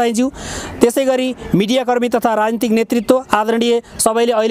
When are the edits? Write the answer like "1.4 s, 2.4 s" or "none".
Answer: none